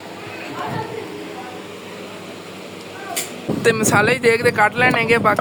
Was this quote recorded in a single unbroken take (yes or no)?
yes